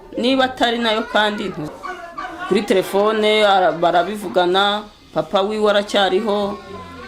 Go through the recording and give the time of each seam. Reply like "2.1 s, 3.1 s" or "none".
1.7 s

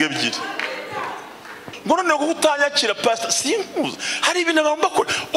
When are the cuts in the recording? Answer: 1.7 s

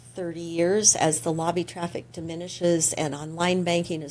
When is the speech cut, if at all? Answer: none

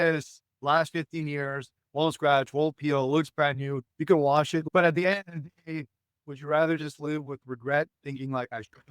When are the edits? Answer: 4.6 s

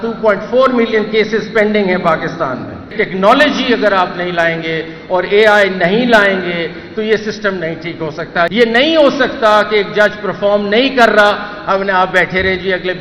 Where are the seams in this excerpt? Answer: 2.9 s, 8.5 s

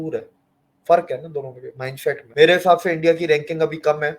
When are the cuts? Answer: 2.2 s

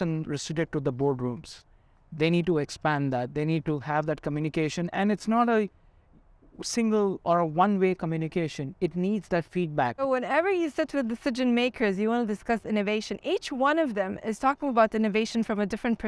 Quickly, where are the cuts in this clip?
10.0 s

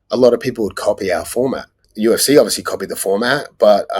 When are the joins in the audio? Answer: 1.9 s

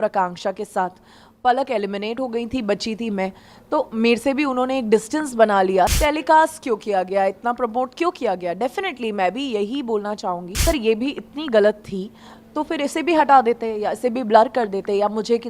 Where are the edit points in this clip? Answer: 5.9 s, 10.6 s

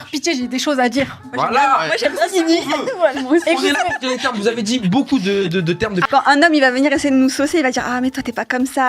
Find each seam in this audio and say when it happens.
6.0 s

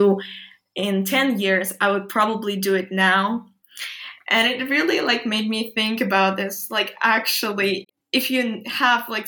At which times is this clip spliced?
7.8 s

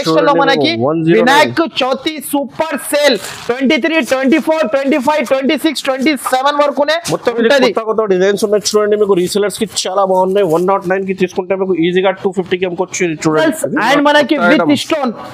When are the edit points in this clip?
13.4 s

